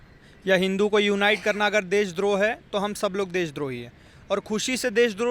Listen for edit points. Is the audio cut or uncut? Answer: uncut